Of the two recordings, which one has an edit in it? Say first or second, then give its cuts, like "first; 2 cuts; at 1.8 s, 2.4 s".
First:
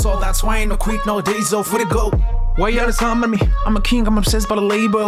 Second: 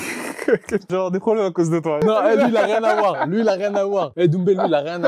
second; 3 cuts; at 0.9 s, 2.0 s, 4.1 s